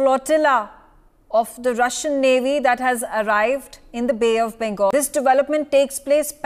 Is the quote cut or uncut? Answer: cut